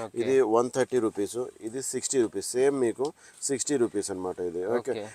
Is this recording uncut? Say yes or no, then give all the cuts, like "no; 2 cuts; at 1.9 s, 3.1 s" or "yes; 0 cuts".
yes; 0 cuts